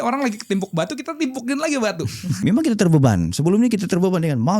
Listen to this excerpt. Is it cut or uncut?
cut